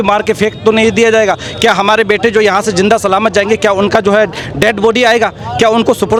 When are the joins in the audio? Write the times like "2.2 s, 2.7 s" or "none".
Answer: none